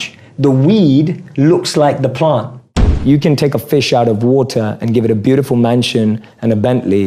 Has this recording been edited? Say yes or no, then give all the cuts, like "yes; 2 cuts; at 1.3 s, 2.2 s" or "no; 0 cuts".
yes; 1 cut; at 3.0 s